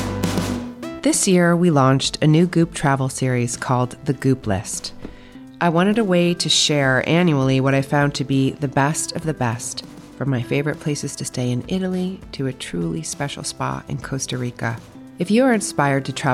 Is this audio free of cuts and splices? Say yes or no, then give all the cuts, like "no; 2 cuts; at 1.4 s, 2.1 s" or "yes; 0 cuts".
no; 1 cut; at 0.9 s